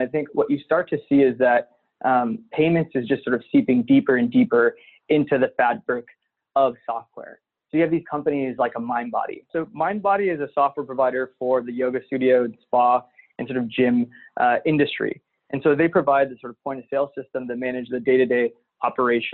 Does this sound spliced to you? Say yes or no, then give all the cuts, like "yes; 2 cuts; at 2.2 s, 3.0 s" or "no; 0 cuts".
yes; 1 cut; at 9.5 s